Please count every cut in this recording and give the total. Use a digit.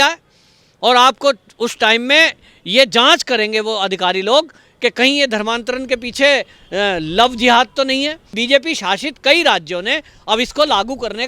1